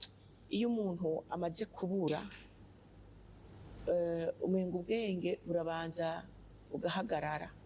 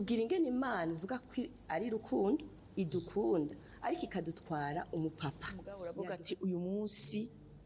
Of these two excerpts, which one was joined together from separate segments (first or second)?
second